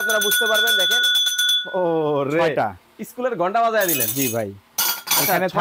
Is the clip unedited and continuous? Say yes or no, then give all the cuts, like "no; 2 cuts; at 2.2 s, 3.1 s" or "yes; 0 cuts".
yes; 0 cuts